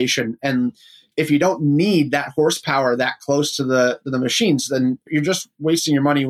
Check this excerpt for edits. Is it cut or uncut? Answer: cut